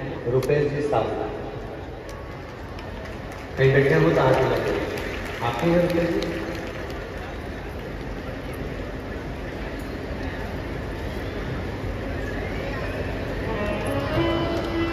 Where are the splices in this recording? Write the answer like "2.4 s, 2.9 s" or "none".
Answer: none

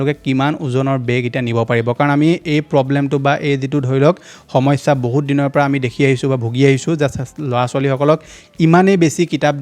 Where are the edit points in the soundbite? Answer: none

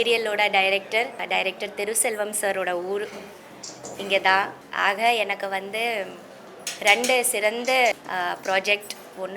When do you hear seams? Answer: 1.2 s, 4.6 s, 7.9 s

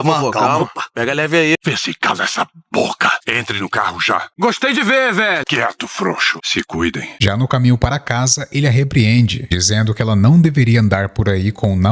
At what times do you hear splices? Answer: none

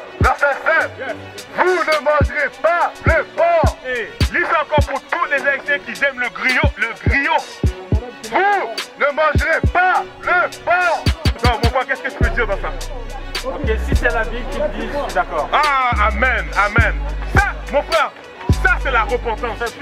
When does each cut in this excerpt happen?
none

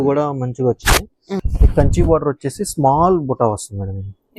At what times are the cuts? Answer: 1.4 s

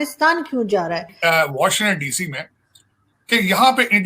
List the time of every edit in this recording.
1.1 s

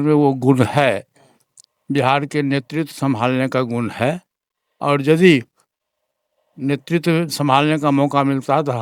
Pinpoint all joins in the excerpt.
none

